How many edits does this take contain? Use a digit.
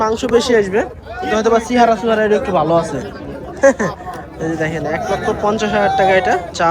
0